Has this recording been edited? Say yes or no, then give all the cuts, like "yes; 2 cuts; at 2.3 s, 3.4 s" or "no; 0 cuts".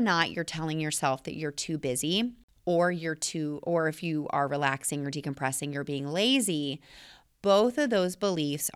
yes; 1 cut; at 2.5 s